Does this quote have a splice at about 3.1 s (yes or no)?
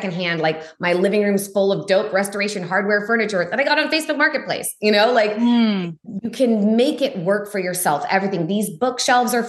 no